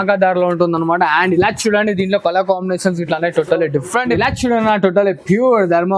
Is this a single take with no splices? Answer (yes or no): no